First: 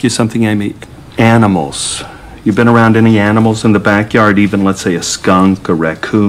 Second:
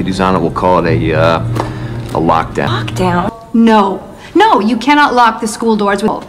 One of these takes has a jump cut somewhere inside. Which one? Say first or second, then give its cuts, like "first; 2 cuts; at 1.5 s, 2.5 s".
second; 1 cut; at 3.2 s